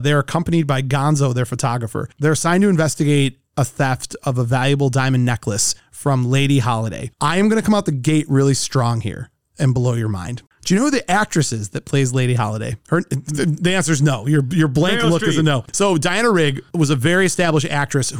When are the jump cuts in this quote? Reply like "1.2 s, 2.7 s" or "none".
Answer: 2.0 s, 10.3 s, 15.7 s